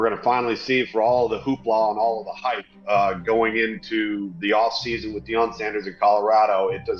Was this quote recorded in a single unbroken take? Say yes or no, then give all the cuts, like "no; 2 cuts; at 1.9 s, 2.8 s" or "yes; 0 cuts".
yes; 0 cuts